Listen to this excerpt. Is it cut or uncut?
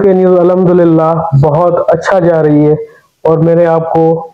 uncut